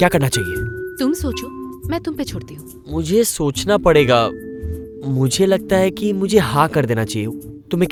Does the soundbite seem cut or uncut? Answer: uncut